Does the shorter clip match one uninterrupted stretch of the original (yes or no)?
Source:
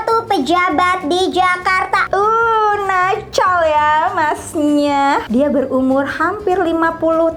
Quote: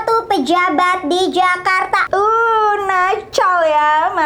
yes